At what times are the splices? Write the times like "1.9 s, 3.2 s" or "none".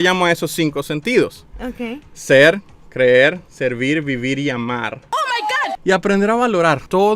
5.2 s